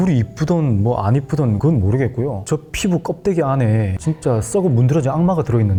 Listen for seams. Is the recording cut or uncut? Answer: uncut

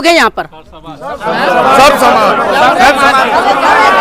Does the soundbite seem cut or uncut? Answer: uncut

